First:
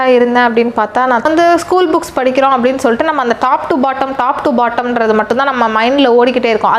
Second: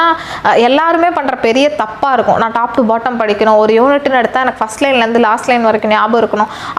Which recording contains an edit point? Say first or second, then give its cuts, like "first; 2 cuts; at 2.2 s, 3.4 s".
first; 1 cut; at 1.2 s